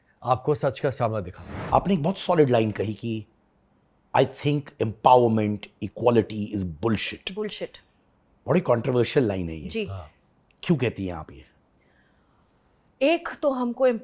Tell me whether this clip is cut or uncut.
cut